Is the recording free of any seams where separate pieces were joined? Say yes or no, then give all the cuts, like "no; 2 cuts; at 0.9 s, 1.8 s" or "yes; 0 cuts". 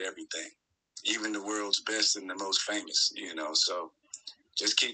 yes; 0 cuts